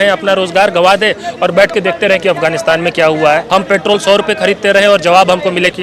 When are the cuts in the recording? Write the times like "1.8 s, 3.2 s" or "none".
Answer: 3.5 s